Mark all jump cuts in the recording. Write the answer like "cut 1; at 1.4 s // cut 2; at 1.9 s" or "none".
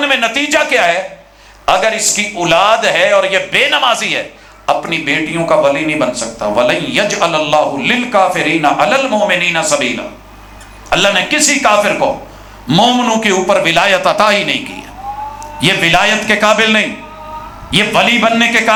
none